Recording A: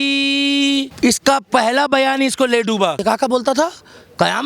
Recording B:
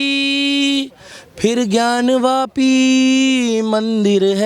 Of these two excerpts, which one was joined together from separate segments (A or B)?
A